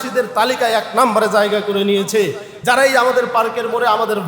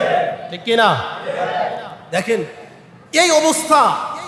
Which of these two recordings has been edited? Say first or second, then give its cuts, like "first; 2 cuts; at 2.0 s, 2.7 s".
first; 1 cut; at 2.5 s